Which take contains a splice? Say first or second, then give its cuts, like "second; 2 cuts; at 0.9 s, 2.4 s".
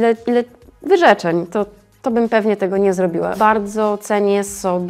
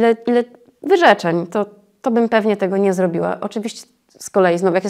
first; 1 cut; at 3.3 s